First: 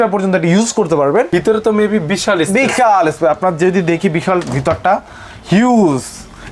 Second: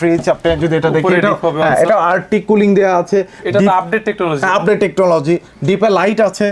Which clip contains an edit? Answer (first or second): first